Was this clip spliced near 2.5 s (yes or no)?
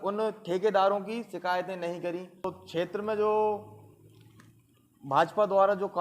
yes